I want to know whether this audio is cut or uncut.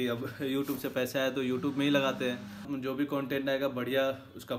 cut